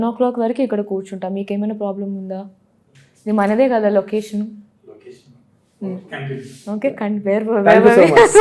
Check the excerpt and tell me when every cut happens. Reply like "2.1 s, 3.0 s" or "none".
none